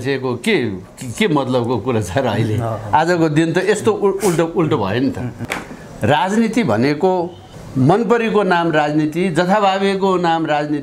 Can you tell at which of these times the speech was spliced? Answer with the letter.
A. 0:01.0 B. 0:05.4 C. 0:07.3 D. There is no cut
B